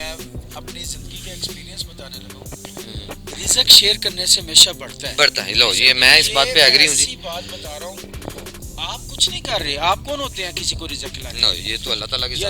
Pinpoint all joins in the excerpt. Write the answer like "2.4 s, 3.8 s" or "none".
none